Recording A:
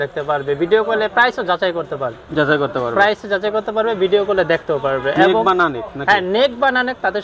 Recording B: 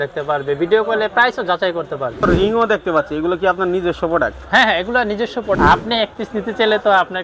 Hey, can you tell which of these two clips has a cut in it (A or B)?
B